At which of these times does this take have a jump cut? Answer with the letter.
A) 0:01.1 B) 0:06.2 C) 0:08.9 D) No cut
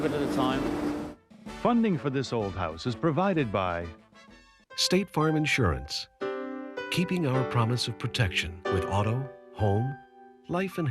A